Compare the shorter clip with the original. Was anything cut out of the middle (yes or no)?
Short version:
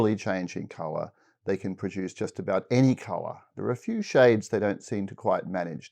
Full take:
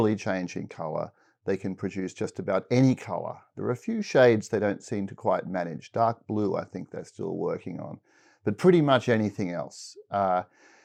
no